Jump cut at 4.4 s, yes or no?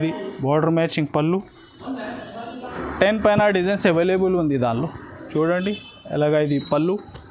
no